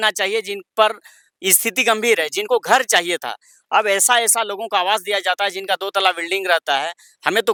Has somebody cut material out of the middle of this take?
no; 0 cuts

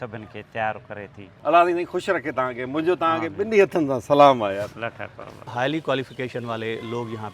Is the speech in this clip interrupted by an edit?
yes; 2 cuts; at 1.2 s, 5.5 s

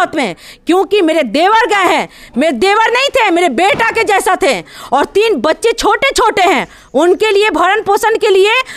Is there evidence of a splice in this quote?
no; 0 cuts

